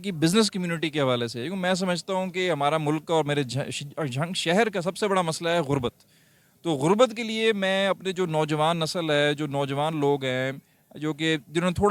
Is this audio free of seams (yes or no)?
yes